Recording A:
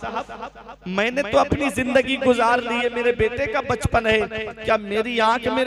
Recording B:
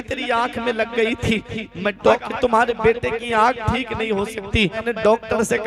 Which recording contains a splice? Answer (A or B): B